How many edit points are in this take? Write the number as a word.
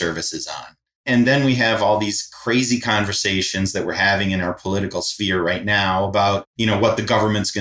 two